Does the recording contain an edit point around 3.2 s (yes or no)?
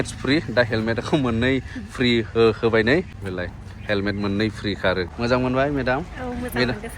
yes